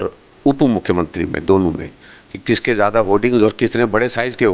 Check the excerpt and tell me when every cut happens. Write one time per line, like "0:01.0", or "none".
none